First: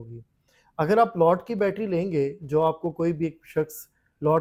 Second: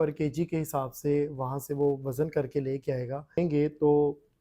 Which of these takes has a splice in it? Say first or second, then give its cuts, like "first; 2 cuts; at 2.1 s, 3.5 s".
second; 1 cut; at 3.4 s